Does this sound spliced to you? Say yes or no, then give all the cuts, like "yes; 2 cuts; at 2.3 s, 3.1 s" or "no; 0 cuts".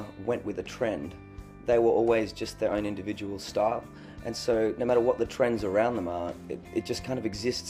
no; 0 cuts